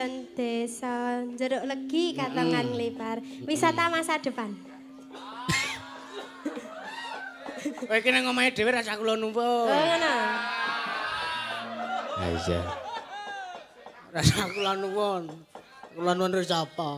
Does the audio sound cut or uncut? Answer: uncut